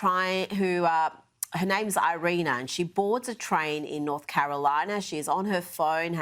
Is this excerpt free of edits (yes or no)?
yes